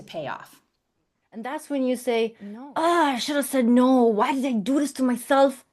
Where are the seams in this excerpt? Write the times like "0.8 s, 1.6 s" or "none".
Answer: 1.6 s